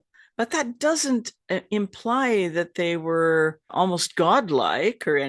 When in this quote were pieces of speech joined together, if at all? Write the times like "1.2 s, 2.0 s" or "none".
3.7 s